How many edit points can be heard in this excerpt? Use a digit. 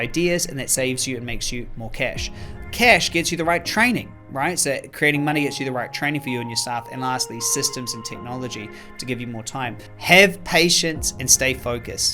1